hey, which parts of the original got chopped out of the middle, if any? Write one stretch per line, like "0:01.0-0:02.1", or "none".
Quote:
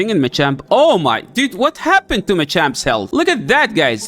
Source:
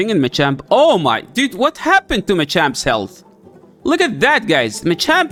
0:03.1-0:03.8